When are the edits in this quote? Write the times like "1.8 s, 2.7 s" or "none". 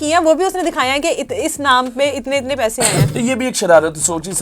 3.0 s